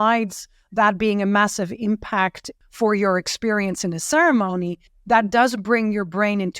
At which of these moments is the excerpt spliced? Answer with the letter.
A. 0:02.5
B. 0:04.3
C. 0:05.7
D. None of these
A